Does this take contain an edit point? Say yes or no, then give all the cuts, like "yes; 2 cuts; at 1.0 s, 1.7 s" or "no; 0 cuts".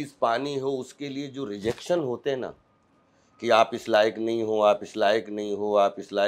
no; 0 cuts